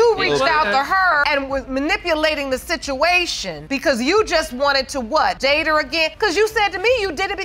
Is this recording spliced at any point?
yes; 2 cuts; at 3.6 s, 5.6 s

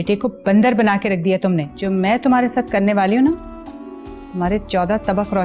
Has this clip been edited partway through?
yes; 1 cut; at 1.7 s

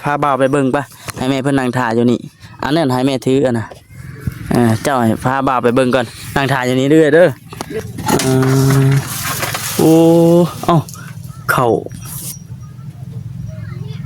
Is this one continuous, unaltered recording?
no; 1 cut; at 7.7 s

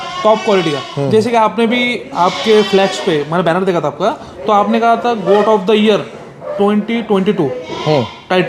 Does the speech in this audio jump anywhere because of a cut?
no; 0 cuts

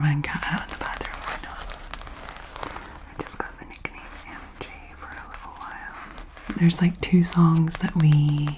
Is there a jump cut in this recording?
yes; 2 cuts; at 2.4 s, 6.6 s

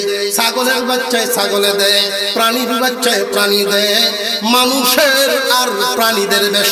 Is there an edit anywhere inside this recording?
no; 0 cuts

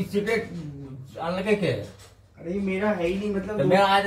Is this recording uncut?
yes; 0 cuts

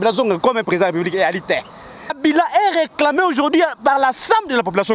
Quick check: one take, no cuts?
no; 1 cut; at 2.1 s

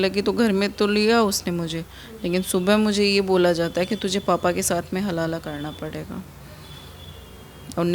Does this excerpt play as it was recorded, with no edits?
yes; 0 cuts

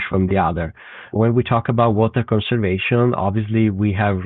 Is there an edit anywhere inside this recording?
yes; 1 cut; at 1.1 s

